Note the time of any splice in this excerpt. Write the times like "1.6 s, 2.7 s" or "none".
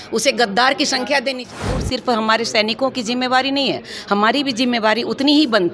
1.8 s